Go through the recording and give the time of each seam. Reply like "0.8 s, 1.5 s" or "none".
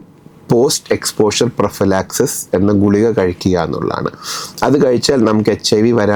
none